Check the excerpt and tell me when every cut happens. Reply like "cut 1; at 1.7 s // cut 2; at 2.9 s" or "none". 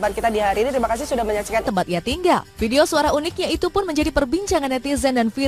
none